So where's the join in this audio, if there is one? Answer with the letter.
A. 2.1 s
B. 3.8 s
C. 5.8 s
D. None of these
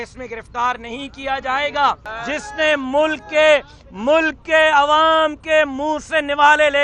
A